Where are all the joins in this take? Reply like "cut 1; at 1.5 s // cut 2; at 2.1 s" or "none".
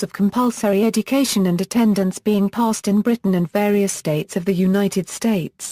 cut 1; at 1.1 s